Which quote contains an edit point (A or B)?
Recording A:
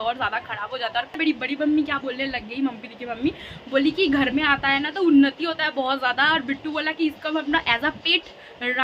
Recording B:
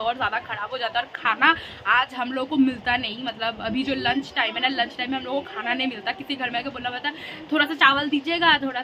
A